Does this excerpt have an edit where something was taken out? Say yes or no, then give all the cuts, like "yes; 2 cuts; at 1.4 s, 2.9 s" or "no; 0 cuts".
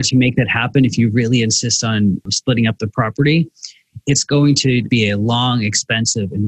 yes; 2 cuts; at 2.3 s, 4.9 s